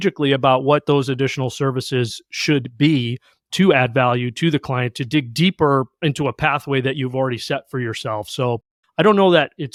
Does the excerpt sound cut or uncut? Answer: uncut